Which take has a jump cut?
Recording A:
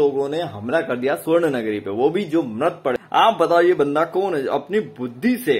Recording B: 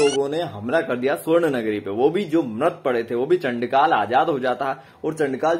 A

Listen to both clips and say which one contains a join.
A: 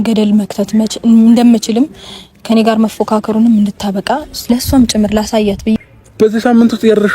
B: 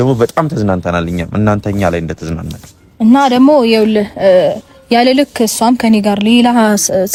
A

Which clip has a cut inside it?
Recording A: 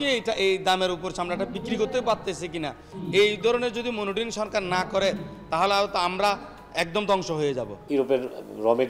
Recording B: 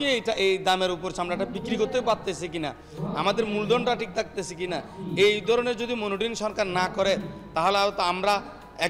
A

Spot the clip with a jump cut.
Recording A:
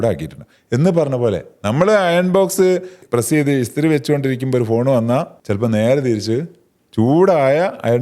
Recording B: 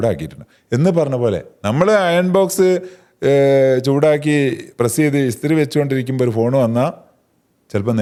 A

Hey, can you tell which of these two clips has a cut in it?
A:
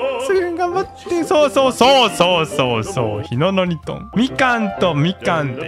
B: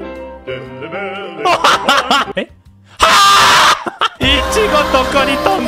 B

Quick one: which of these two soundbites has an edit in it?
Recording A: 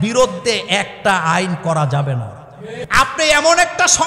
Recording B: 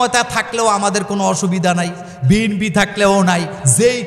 A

